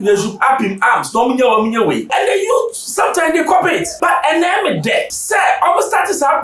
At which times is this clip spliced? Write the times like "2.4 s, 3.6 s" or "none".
2.0 s, 3.9 s, 5.2 s